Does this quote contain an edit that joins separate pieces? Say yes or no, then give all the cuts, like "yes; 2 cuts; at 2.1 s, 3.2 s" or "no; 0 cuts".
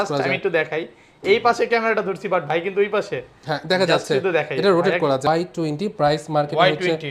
yes; 1 cut; at 5.3 s